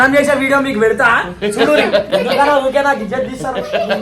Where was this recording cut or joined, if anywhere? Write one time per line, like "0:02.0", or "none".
0:02.0